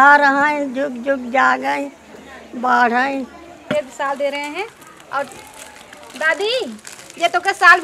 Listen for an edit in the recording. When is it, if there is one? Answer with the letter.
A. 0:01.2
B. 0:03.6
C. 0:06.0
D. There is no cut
B